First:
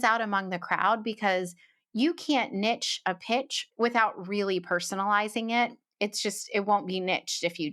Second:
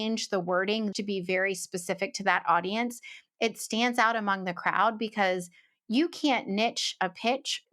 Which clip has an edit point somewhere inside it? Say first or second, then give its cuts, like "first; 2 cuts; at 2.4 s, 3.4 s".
second; 1 cut; at 0.9 s